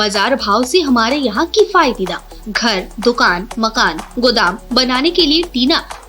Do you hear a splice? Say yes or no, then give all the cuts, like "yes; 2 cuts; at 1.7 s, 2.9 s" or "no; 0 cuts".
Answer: no; 0 cuts